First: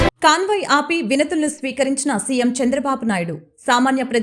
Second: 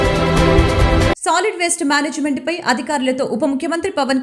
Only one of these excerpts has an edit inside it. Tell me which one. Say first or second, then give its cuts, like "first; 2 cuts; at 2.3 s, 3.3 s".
second; 1 cut; at 1.2 s